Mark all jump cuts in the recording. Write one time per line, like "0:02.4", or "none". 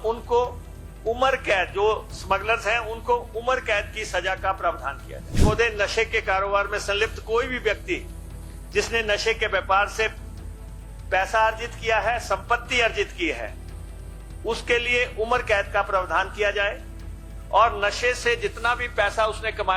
0:05.4